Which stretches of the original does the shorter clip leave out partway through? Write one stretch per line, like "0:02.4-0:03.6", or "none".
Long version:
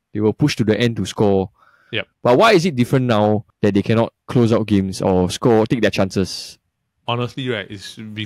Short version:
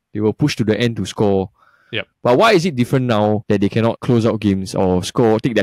0:03.7-0:03.9